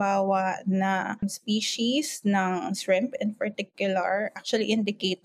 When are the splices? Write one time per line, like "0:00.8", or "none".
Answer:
0:01.2